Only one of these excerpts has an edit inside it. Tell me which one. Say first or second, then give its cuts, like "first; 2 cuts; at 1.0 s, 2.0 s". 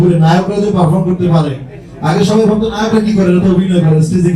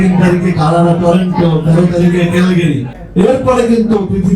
second; 1 cut; at 2.9 s